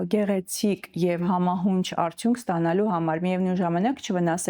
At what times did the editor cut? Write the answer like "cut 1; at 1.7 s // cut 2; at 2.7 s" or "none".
none